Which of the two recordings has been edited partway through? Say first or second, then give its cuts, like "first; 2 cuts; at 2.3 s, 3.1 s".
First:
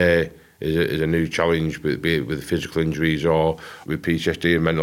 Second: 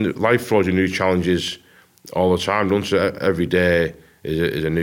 first; 1 cut; at 3.7 s